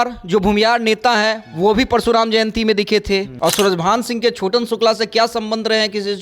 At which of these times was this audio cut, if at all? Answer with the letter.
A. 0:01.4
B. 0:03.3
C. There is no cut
B